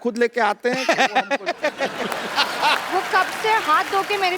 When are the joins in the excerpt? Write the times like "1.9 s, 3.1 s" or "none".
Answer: 2.8 s